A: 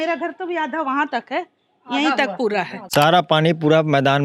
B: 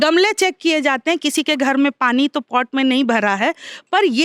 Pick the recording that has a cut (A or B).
A